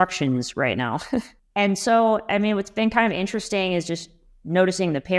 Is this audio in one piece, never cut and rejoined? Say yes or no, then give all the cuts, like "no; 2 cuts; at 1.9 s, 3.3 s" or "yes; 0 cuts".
yes; 0 cuts